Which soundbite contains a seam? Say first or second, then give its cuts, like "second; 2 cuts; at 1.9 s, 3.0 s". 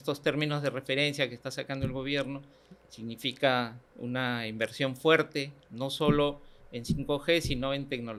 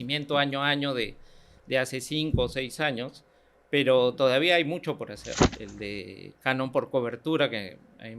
second; 1 cut; at 5.5 s